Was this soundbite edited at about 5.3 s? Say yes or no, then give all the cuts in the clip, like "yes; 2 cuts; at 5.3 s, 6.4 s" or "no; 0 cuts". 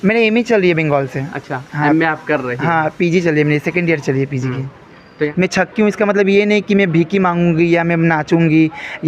yes; 1 cut; at 5.3 s